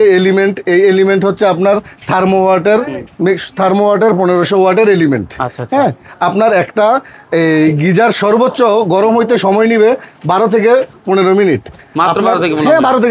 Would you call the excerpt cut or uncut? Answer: uncut